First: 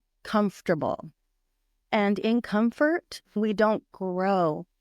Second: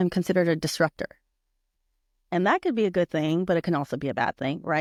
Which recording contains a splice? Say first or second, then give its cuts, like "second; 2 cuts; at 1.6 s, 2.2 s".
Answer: first; 1 cut; at 3.4 s